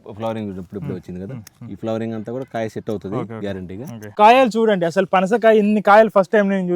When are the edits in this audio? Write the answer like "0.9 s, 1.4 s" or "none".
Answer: 4.1 s